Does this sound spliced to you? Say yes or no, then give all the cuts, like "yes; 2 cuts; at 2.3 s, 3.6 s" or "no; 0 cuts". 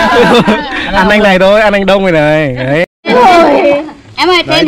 yes; 1 cut; at 2.9 s